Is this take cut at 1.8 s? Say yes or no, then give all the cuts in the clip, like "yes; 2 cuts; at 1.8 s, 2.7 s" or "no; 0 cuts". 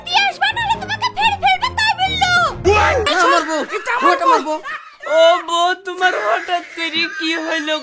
no; 1 cut; at 3.1 s